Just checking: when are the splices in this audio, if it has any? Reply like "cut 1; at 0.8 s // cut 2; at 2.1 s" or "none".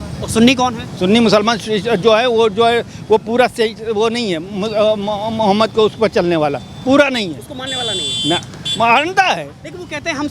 none